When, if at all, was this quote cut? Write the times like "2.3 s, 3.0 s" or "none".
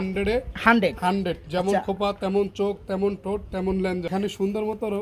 4.1 s